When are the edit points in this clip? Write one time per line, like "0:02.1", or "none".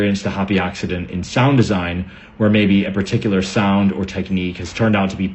none